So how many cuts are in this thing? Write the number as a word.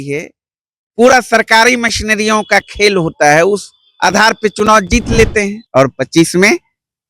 one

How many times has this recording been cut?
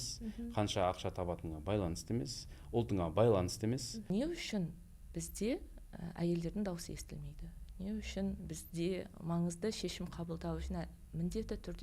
one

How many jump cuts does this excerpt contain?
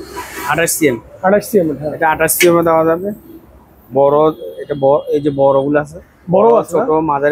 zero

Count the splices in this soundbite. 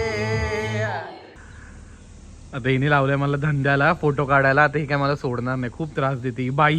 one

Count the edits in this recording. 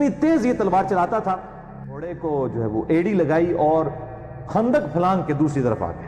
one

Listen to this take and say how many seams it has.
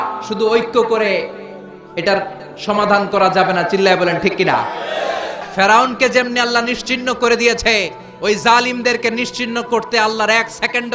one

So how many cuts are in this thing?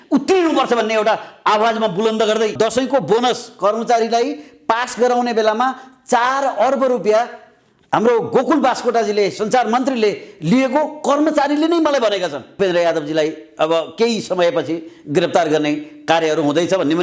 two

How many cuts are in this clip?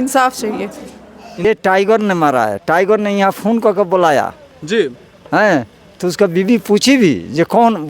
one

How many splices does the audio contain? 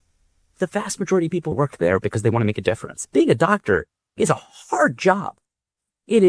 two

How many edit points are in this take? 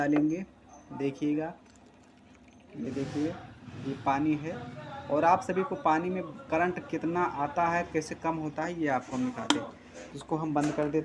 zero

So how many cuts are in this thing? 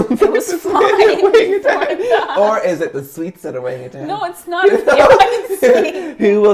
zero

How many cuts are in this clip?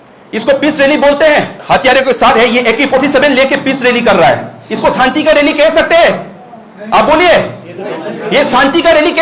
one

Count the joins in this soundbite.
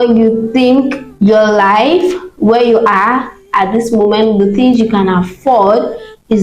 one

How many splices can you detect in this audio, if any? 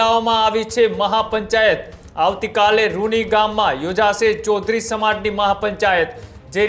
zero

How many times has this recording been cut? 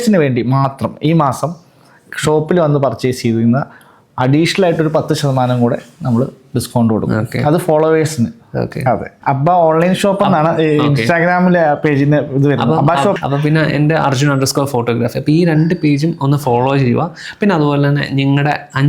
two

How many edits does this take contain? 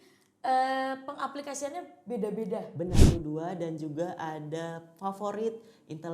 one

